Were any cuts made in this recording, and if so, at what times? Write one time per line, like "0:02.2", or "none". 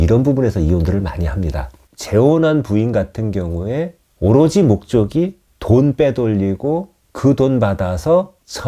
0:01.8